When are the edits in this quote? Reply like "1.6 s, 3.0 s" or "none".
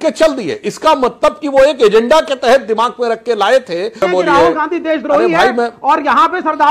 4.0 s